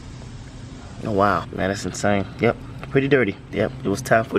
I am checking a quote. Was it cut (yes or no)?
yes